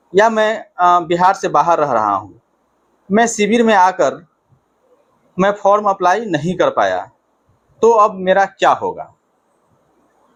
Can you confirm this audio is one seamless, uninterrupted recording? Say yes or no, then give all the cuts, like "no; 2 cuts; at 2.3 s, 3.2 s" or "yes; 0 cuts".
yes; 0 cuts